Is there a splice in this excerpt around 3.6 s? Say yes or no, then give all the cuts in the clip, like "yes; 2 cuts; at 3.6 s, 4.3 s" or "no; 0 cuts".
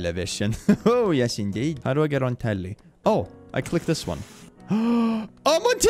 no; 1 cut; at 1.8 s